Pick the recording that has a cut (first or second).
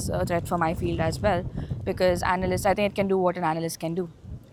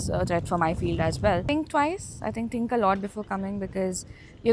second